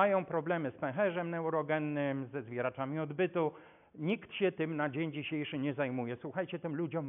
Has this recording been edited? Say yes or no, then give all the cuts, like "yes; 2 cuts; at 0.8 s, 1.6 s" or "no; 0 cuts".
no; 0 cuts